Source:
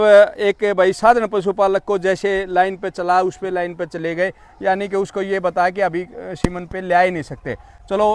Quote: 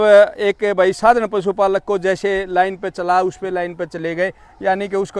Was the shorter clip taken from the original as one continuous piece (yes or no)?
yes